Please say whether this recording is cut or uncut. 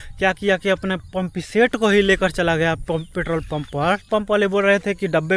cut